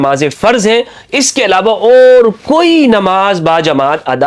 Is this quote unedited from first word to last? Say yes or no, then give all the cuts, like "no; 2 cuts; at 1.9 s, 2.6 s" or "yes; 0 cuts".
yes; 0 cuts